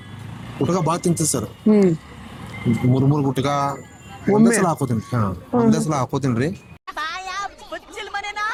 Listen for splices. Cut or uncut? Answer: uncut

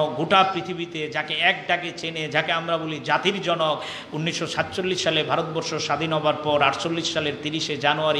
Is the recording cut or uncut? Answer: uncut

